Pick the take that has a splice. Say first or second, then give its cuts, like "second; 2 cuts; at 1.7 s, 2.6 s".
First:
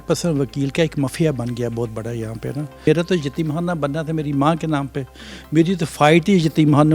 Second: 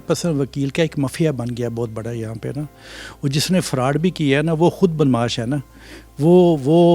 first; 1 cut; at 2.9 s